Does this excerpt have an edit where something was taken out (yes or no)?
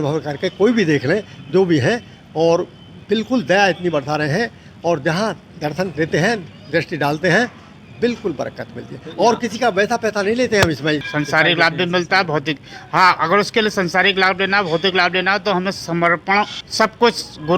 yes